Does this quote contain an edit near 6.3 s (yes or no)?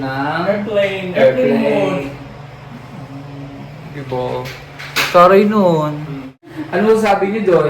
yes